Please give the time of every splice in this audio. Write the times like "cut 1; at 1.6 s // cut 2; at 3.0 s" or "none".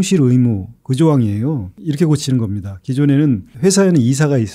cut 1; at 1.8 s // cut 2; at 3.5 s